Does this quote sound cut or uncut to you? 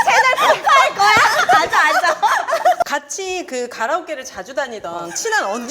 cut